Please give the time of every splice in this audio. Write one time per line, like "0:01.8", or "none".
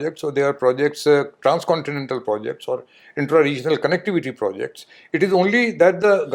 none